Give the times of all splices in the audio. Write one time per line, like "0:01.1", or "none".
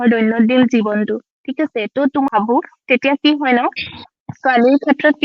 0:02.3